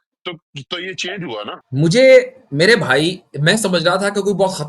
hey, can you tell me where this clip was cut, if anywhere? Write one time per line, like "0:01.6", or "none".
0:01.6